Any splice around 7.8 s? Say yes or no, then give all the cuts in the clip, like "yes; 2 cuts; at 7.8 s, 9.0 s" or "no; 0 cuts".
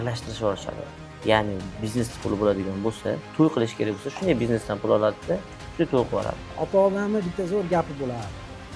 no; 1 cut; at 6.4 s